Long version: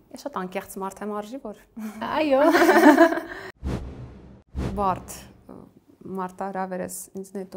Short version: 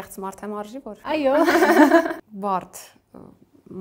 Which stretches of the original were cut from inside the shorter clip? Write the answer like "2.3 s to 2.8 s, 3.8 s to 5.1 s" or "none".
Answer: 1.6 s to 2.1 s, 3.4 s to 4.7 s